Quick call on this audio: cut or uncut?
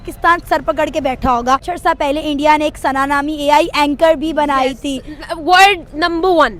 cut